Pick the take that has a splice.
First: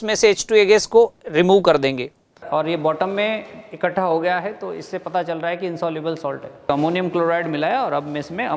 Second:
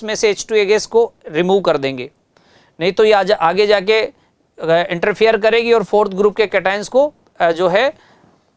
first; 2 cuts; at 2.4 s, 6.7 s

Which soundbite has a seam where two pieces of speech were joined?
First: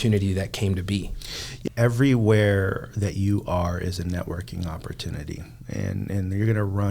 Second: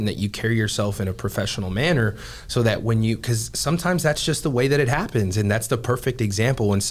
first; 1 cut; at 1.6 s

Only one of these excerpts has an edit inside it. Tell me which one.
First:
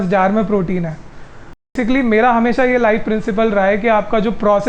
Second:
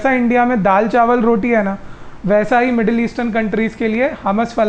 first; 1 cut; at 1.7 s

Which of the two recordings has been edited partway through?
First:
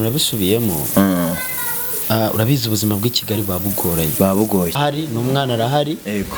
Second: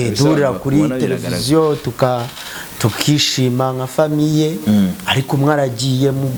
first; 1 cut; at 4.8 s

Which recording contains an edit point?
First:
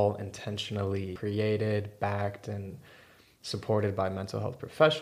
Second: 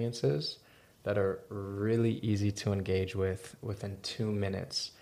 first; 1 cut; at 1.1 s

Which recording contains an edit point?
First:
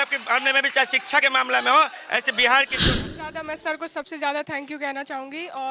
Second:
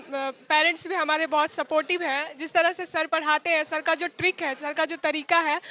first; 1 cut; at 3.2 s

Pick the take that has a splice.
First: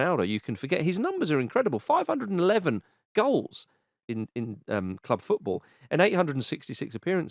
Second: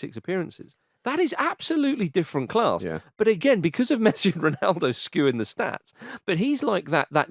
first; 1 cut; at 4.0 s

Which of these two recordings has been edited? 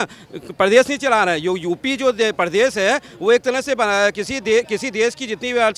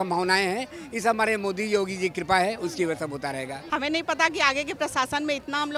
second; 1 cut; at 3.6 s

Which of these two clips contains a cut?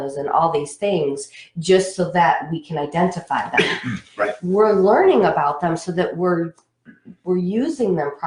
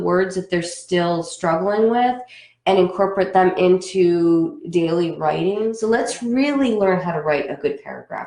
second; 1 cut; at 5.8 s

